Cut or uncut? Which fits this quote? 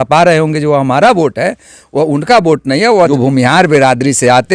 cut